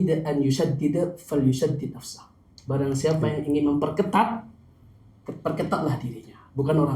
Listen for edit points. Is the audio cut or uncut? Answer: uncut